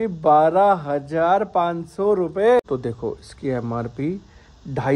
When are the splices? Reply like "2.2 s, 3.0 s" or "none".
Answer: 2.6 s